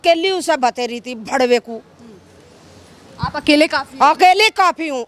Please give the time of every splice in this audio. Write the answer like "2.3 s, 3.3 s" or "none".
none